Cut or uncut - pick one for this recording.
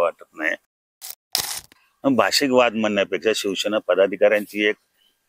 cut